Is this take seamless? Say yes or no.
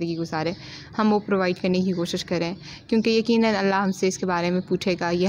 yes